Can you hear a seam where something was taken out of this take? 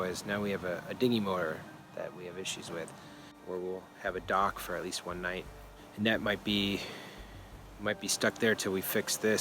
yes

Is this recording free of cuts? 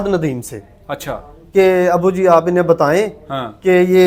yes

